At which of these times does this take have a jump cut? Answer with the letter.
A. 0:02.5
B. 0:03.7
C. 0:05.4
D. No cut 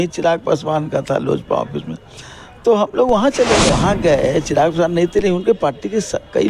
B